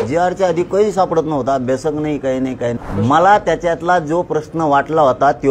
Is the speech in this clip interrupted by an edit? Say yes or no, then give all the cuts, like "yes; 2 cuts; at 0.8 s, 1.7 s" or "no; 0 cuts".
yes; 1 cut; at 2.8 s